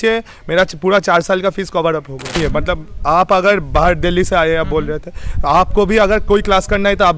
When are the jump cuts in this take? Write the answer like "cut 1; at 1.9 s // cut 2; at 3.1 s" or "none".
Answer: cut 1; at 2.4 s